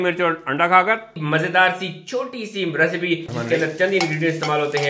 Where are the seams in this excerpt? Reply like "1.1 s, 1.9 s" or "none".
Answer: 1.1 s, 3.3 s